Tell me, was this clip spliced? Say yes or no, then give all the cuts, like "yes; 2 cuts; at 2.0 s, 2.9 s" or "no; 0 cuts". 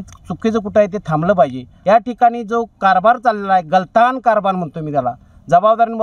yes; 1 cut; at 1.7 s